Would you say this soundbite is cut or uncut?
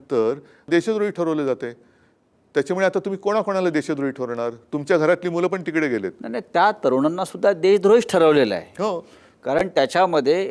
uncut